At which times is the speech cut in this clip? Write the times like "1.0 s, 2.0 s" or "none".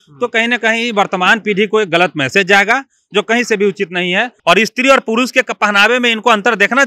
4.3 s